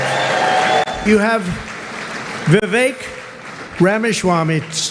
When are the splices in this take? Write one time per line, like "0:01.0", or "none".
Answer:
0:01.0